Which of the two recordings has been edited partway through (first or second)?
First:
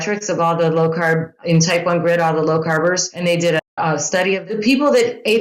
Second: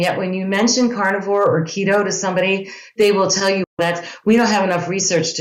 first